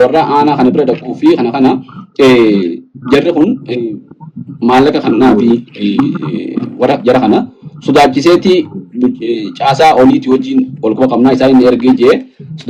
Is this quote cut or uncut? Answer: uncut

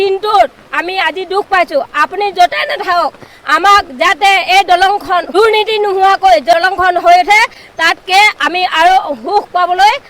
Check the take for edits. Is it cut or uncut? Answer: cut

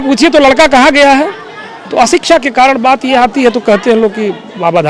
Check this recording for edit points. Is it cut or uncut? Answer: uncut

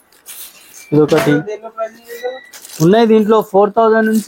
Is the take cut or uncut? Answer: uncut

